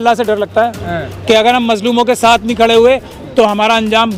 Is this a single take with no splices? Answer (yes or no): yes